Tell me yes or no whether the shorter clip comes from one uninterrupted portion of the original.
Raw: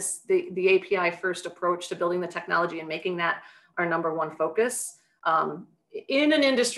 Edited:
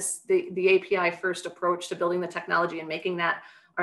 yes